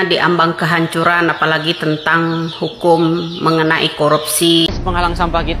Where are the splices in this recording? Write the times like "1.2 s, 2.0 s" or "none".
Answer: 4.7 s